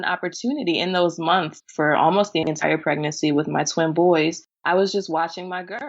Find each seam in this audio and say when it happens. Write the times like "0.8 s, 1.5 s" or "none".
1.5 s, 4.5 s